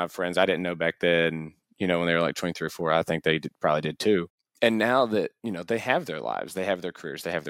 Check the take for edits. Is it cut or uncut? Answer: cut